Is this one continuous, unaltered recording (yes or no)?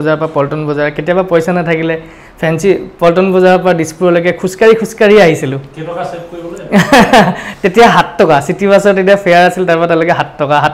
yes